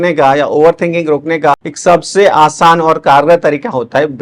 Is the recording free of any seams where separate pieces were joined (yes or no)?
no